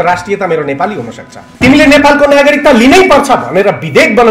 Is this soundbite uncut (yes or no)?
no